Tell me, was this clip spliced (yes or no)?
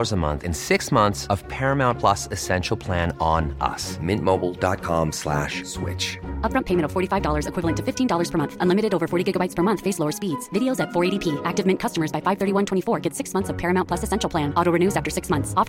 no